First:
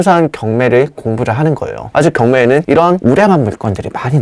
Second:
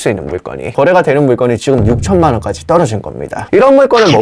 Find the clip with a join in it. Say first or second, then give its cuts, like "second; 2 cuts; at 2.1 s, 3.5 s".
second; 2 cuts; at 0.7 s, 3.3 s